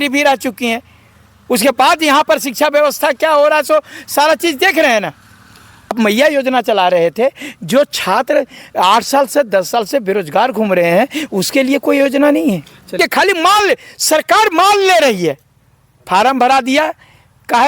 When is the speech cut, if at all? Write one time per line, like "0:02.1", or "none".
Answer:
0:06.0
0:13.0